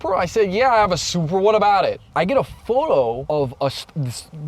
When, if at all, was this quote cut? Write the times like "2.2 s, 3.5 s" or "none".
2.0 s, 3.2 s

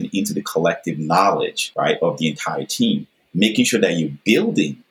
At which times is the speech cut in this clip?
1.6 s

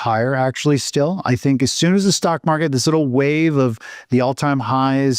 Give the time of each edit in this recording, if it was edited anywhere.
none

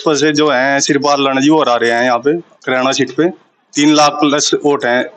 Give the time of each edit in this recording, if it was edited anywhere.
none

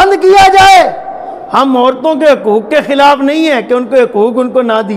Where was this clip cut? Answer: none

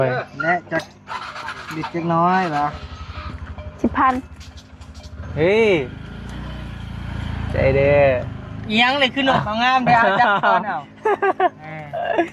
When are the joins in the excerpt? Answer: none

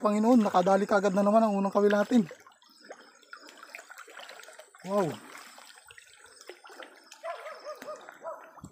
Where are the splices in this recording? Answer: none

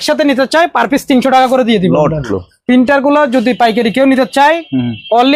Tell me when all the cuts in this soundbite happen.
2.4 s

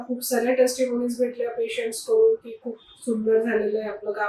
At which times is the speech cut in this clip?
none

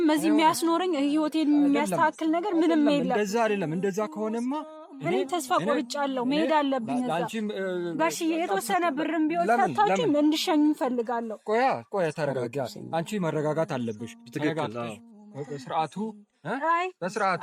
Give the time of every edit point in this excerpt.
none

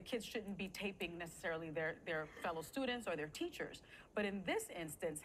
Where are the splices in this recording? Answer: none

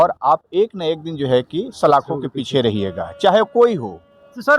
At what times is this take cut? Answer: none

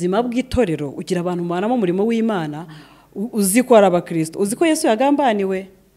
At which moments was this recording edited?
none

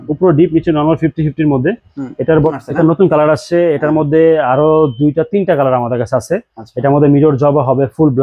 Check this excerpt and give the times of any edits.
2.6 s

